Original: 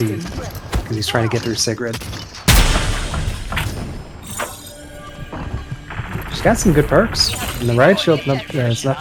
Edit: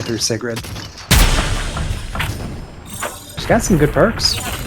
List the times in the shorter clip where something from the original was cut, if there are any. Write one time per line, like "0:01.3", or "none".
0:03.3